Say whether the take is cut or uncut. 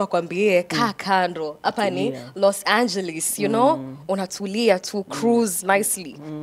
uncut